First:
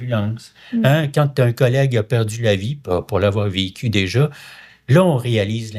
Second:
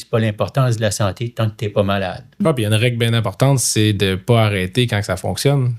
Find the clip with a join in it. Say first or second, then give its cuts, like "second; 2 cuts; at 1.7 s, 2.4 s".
second; 1 cut; at 2.2 s